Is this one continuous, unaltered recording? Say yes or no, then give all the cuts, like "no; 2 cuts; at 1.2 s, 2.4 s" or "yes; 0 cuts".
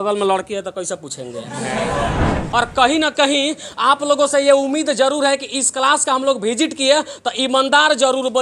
no; 1 cut; at 2.4 s